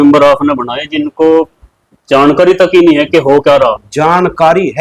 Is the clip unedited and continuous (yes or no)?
yes